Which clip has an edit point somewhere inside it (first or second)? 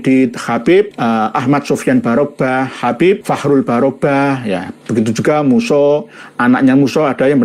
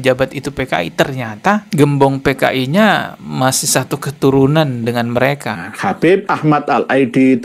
second